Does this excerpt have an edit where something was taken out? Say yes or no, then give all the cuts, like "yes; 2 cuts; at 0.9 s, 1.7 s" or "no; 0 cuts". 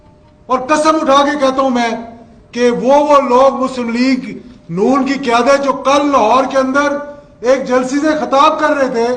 no; 0 cuts